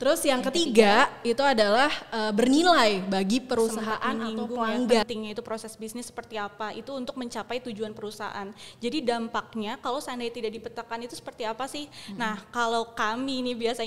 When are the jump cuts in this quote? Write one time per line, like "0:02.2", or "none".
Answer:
0:05.0